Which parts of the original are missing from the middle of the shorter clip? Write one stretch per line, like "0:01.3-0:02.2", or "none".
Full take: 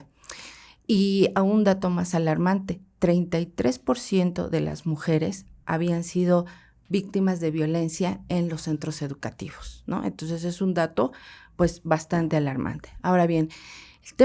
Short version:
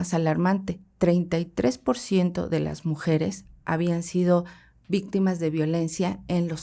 none